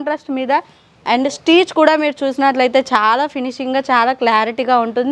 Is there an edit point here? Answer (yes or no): no